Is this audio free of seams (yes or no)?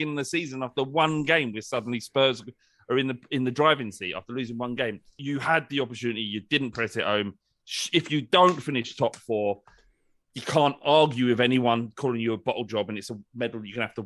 no